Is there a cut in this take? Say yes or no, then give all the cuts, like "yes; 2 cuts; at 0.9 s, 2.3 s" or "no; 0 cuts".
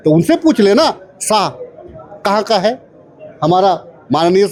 no; 0 cuts